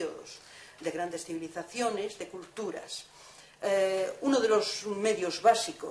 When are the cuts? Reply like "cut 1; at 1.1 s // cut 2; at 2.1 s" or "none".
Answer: cut 1; at 4.5 s

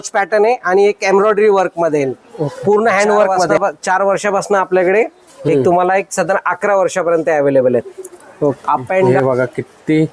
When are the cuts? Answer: cut 1; at 3.5 s // cut 2; at 9.1 s

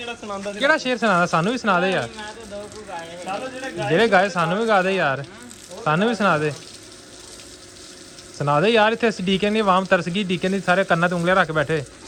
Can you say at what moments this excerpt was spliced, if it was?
none

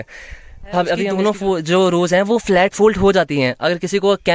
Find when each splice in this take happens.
cut 1; at 1.1 s

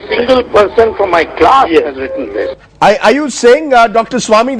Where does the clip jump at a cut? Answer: cut 1; at 3.0 s

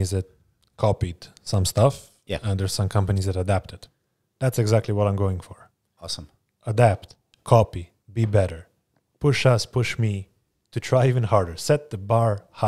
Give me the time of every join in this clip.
none

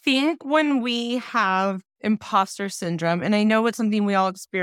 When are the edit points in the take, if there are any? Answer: cut 1; at 1.9 s

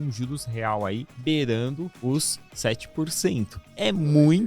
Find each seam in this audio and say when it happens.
cut 1; at 1.1 s // cut 2; at 1.9 s

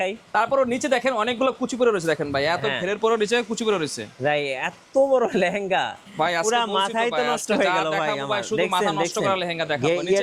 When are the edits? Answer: cut 1; at 6.0 s

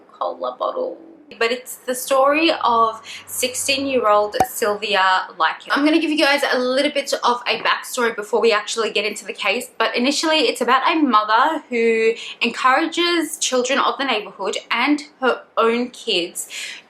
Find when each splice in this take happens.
cut 1; at 1.3 s

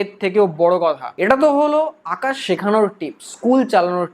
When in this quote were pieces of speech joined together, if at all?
none

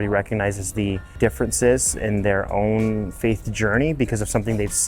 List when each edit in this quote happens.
cut 1; at 1.1 s

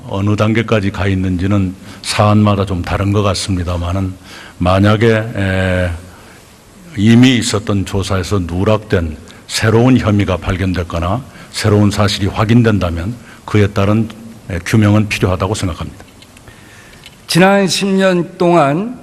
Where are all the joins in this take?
cut 1; at 2.3 s

